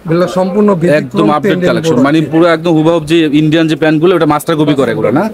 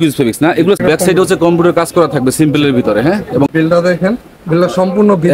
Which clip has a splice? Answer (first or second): second